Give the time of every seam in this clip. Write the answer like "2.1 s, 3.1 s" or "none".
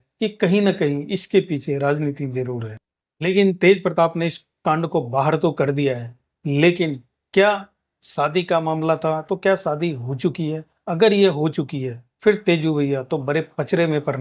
none